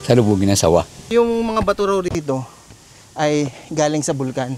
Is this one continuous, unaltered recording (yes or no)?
no